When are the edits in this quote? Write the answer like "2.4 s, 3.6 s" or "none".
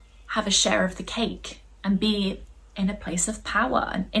none